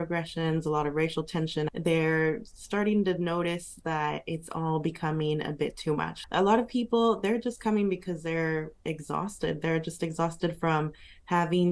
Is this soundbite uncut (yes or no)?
no